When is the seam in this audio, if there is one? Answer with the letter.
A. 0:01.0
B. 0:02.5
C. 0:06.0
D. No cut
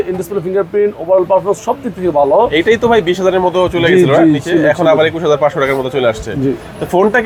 D